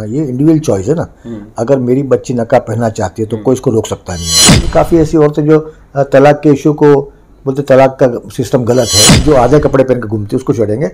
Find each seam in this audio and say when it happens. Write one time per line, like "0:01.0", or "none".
0:04.6
0:09.2